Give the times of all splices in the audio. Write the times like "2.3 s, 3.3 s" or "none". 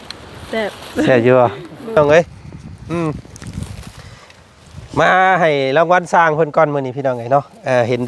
2.0 s